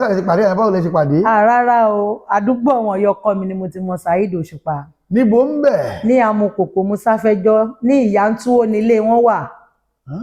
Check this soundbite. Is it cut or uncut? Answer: uncut